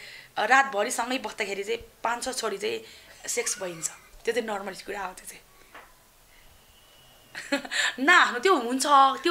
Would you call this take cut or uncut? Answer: uncut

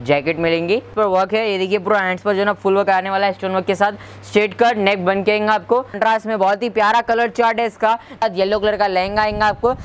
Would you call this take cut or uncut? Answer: cut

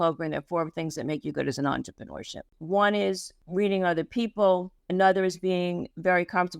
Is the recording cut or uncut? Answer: cut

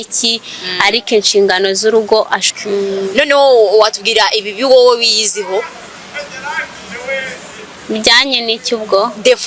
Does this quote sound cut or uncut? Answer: cut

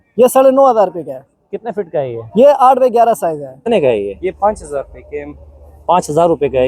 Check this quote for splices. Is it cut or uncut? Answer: cut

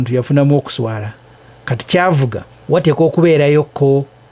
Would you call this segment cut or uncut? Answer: cut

